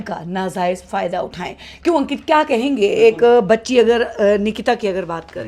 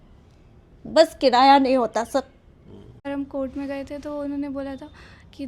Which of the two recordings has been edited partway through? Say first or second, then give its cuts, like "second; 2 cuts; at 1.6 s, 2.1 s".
second; 1 cut; at 3.0 s